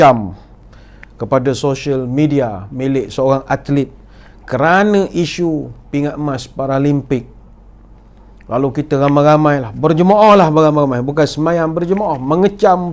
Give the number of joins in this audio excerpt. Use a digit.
0